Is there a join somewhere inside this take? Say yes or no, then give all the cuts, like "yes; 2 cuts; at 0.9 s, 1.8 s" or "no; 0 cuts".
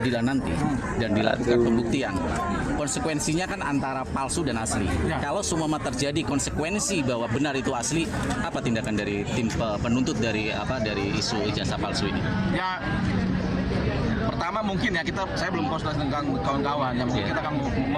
no; 0 cuts